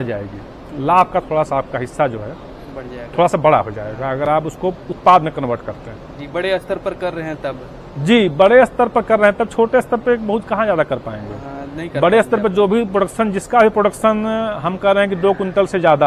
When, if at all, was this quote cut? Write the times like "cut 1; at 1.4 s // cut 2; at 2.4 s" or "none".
none